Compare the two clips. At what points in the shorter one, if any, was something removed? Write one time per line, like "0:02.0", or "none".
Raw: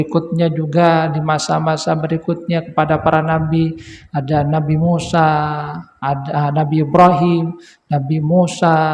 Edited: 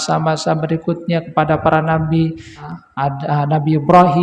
0:02.6